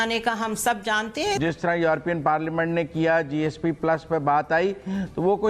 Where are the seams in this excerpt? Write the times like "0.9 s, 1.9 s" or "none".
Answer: 1.4 s